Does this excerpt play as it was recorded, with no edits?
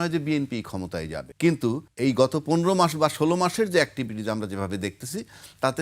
no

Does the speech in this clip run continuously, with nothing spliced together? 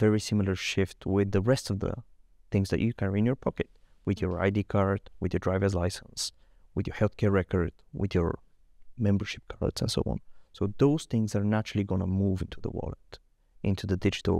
yes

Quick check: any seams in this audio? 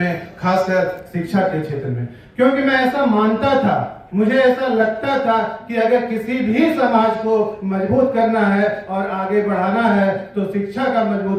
no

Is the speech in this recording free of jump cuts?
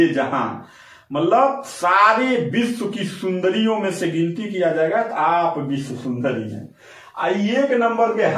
yes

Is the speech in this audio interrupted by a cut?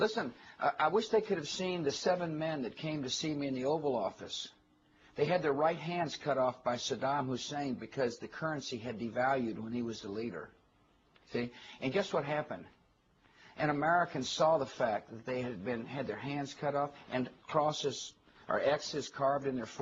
no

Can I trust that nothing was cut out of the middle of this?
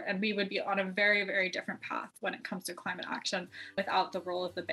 no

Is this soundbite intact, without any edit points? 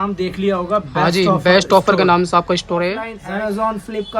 no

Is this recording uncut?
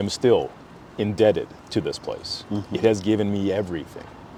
yes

